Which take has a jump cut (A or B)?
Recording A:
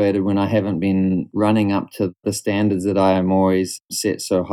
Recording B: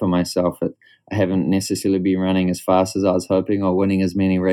A